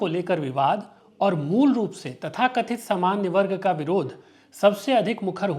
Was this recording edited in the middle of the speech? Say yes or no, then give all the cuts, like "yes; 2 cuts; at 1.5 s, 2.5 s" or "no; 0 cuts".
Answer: no; 0 cuts